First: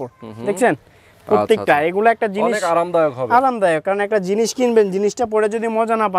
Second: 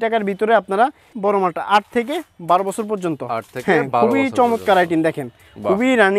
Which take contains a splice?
second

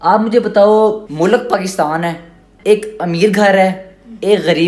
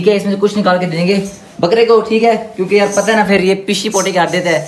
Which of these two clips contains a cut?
first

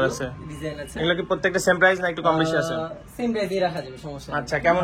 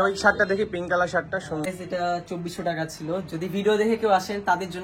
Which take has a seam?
second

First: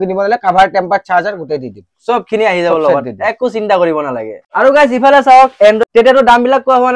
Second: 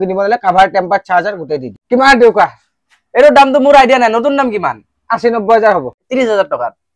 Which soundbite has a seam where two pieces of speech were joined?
second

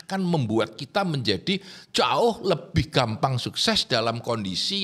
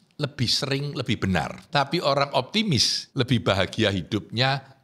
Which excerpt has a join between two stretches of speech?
second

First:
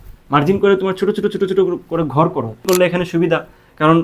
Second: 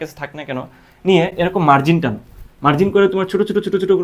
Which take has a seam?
first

